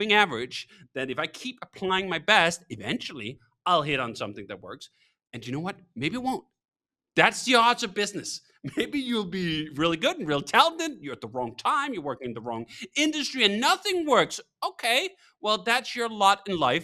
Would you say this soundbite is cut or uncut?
uncut